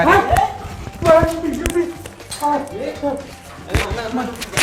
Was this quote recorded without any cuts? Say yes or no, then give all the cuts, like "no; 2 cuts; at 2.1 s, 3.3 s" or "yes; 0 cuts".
yes; 0 cuts